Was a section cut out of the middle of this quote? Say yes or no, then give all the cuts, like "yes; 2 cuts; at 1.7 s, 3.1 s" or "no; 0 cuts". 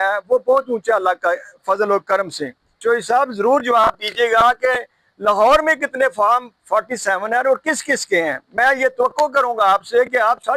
yes; 1 cut; at 2.8 s